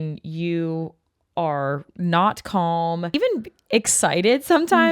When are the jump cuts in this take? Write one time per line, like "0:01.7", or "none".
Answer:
0:03.1